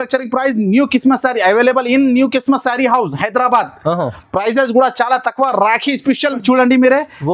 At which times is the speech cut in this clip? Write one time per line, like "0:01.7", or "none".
0:06.4